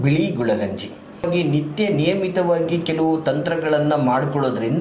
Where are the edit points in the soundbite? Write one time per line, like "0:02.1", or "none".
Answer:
0:01.3